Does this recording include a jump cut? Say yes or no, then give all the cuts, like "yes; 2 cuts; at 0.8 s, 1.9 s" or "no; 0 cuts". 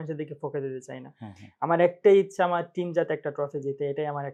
no; 0 cuts